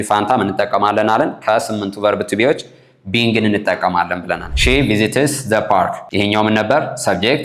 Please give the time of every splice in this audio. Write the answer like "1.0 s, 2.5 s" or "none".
4.5 s, 6.0 s